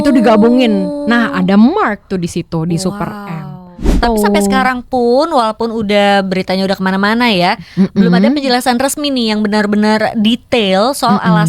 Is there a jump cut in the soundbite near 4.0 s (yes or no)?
yes